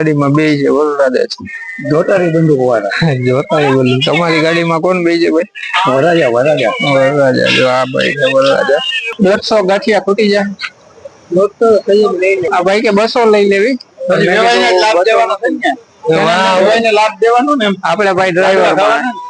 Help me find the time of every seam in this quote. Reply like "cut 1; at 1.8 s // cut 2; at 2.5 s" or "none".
cut 1; at 9.1 s // cut 2; at 12.5 s